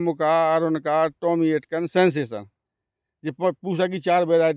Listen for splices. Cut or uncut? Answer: uncut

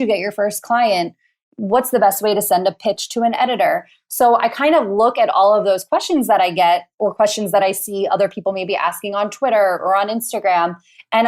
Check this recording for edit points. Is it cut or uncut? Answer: uncut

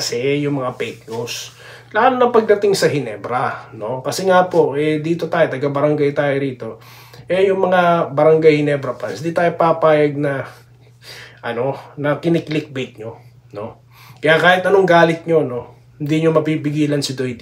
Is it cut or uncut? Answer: uncut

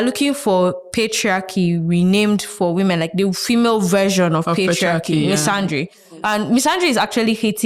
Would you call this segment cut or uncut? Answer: uncut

